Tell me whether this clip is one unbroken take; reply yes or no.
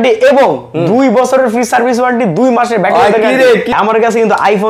no